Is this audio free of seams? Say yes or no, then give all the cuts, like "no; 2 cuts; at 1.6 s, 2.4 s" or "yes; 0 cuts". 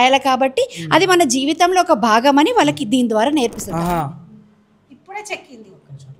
no; 1 cut; at 3.6 s